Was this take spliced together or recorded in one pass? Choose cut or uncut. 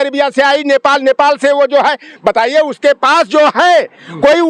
uncut